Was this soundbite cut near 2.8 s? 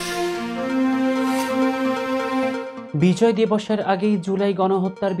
yes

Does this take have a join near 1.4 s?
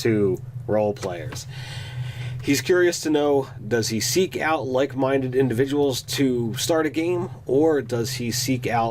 yes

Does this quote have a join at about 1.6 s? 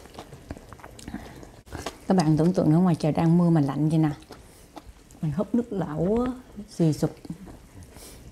yes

